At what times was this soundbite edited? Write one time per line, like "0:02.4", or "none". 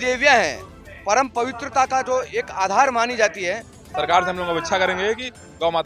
0:03.9

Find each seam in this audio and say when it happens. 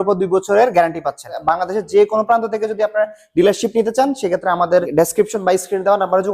0:01.3
0:04.9

